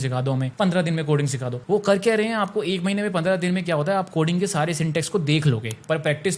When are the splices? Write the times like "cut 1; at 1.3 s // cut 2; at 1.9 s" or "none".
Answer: none